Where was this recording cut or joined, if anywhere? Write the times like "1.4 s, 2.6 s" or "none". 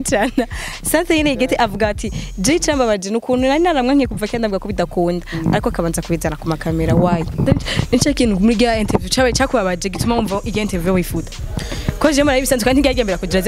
none